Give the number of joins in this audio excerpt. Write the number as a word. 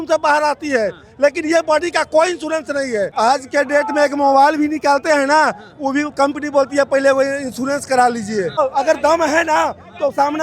two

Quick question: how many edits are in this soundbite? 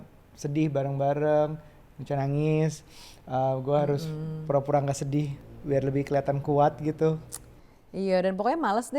zero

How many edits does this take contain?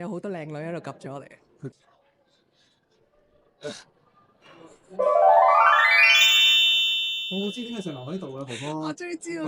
one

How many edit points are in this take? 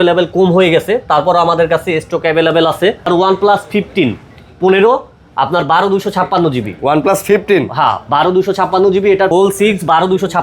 two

